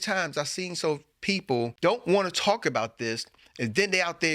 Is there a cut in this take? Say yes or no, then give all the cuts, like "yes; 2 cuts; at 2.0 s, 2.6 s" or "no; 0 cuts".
yes; 1 cut; at 1.7 s